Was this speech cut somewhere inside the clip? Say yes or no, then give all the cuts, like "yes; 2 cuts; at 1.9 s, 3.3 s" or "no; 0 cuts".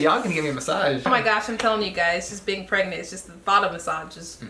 yes; 1 cut; at 1.1 s